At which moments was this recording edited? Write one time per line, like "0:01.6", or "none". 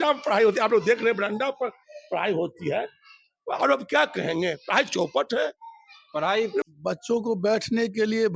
0:06.7